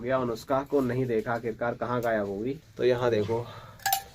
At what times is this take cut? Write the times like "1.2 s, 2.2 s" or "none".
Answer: 2.6 s

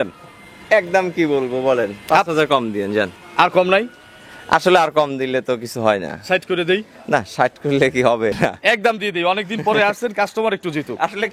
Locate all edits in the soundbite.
3.1 s, 8.4 s

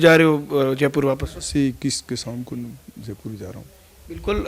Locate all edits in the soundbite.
none

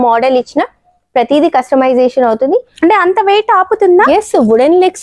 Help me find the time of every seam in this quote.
2.7 s

